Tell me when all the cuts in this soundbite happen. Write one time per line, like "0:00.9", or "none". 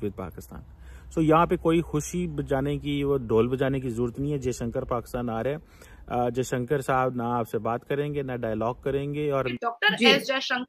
0:09.5